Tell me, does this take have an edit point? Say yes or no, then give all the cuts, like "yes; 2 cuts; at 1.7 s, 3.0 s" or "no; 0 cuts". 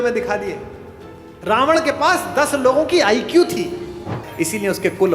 yes; 1 cut; at 4.2 s